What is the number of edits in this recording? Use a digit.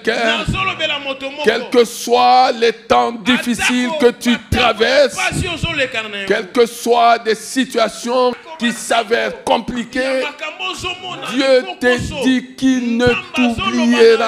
0